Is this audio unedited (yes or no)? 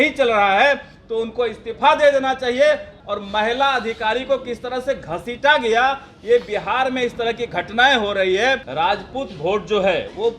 no